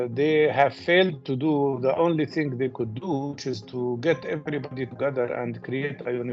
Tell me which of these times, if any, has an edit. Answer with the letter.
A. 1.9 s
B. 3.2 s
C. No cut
C